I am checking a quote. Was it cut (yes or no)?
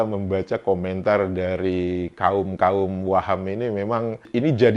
no